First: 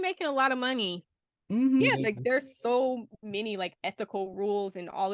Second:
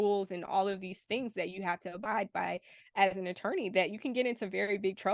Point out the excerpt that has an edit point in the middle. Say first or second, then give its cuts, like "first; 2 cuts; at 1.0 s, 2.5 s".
first; 1 cut; at 1.8 s